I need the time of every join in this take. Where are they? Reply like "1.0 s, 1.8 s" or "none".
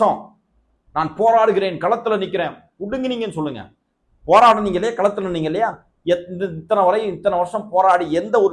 none